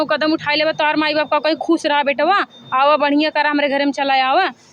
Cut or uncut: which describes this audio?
uncut